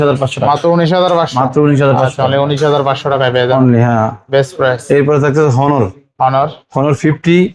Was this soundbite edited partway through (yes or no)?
no